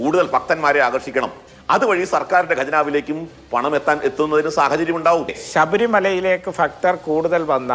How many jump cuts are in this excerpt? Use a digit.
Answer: 1